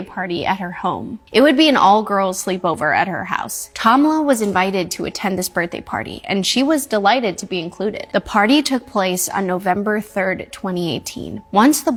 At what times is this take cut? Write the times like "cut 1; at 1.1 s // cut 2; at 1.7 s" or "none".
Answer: none